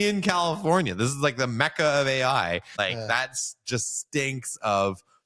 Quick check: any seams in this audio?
yes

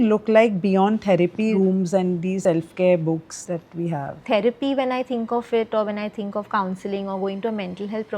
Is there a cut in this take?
yes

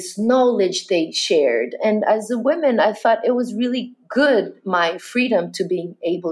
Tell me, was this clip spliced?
no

